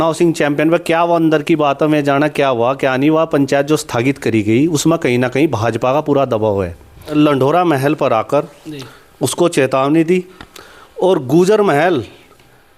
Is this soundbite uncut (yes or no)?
no